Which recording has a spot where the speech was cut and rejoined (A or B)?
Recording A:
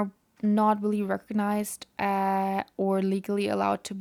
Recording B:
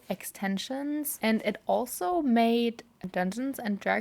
B